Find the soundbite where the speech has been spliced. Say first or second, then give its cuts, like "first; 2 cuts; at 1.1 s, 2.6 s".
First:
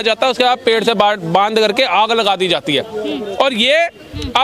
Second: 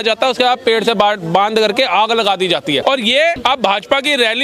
second; 1 cut; at 3.0 s